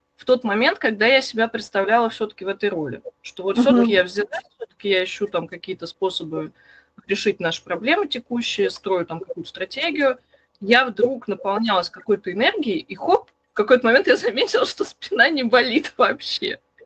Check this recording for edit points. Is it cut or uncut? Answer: uncut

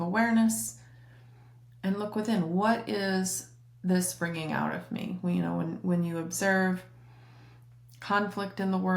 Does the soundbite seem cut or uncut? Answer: uncut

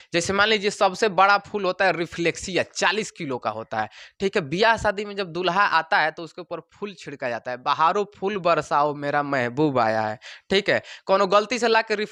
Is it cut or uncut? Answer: uncut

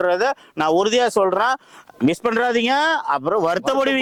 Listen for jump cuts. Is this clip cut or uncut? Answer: uncut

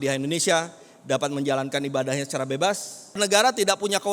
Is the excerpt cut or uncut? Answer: cut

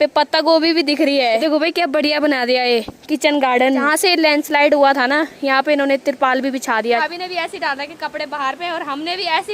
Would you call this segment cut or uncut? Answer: cut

